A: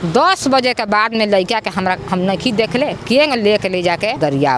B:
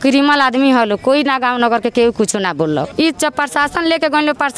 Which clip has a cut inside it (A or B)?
B